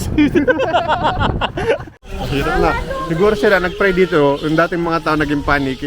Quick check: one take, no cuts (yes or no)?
no